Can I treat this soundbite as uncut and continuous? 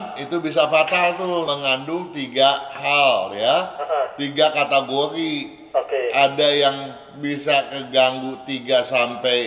no; 1 cut; at 1.5 s

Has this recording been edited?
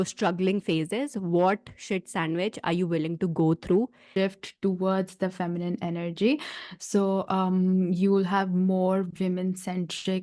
yes; 1 cut; at 4.0 s

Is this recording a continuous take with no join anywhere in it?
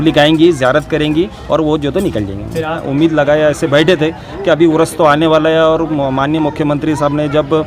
no; 1 cut; at 2.8 s

